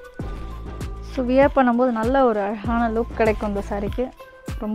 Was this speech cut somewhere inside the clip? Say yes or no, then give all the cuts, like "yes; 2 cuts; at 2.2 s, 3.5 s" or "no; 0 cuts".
yes; 1 cut; at 1.1 s